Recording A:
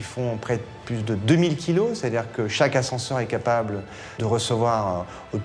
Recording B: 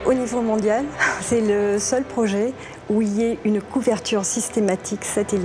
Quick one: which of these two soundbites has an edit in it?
A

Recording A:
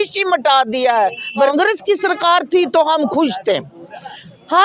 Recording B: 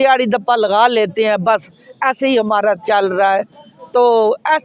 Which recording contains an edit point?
A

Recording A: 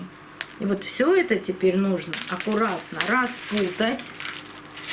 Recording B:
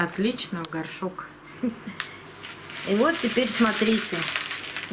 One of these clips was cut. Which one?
B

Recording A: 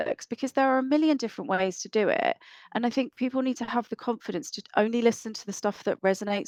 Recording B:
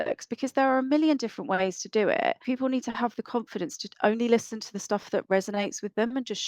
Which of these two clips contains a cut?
B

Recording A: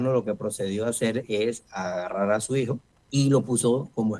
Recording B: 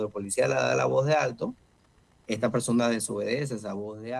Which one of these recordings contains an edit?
A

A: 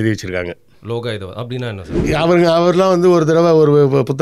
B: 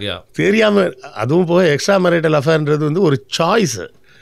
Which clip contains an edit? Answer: A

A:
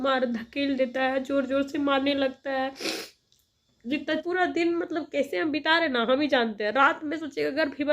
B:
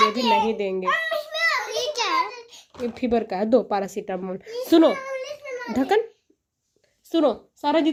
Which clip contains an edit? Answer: A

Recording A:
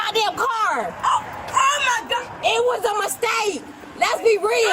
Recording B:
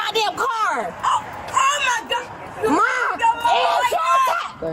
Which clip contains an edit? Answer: A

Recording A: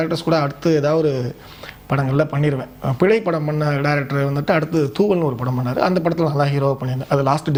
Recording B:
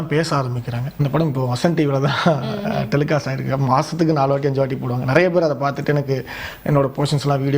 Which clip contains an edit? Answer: B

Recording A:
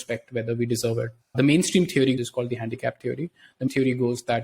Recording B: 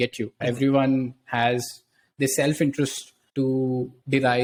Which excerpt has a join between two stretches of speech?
A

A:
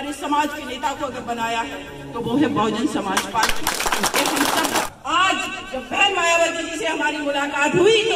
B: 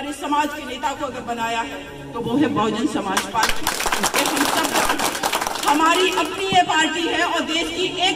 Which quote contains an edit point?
A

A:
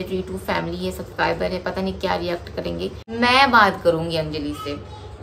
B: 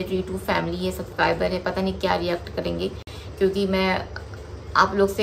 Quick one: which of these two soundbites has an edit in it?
A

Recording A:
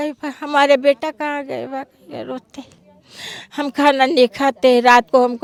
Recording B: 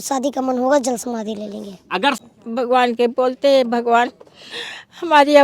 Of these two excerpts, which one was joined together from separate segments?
B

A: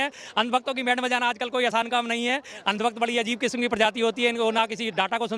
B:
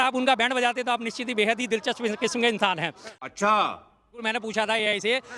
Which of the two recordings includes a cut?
B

